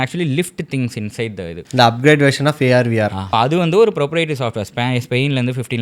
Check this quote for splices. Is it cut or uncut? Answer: cut